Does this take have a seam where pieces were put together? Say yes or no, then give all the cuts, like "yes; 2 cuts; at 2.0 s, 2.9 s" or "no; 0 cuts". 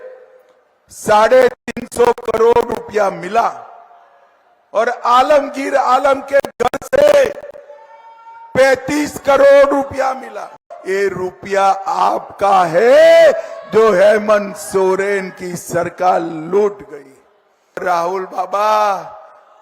yes; 2 cuts; at 10.7 s, 17.8 s